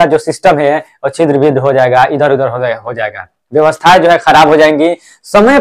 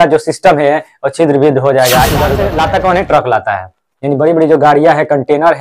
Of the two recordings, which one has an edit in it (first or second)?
second